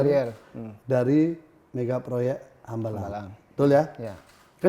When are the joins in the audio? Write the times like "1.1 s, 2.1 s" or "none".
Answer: none